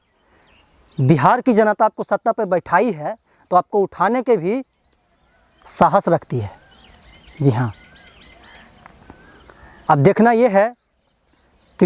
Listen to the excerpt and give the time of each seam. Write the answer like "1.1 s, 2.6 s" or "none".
none